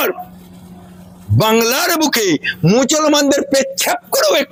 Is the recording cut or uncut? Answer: uncut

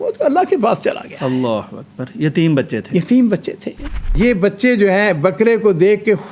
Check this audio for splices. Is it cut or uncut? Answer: cut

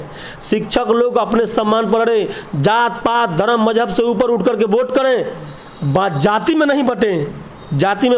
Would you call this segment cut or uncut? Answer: uncut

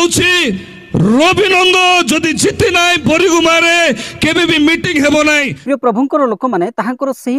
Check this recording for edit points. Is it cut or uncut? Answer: cut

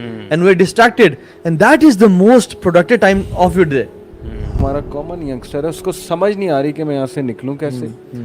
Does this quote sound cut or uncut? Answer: cut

